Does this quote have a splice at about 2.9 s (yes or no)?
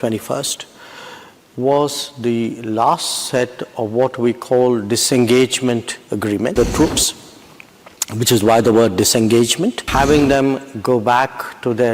no